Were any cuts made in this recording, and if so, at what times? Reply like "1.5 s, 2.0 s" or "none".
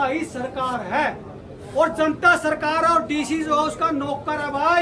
none